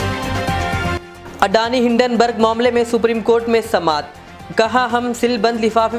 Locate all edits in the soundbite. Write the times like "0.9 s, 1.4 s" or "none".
none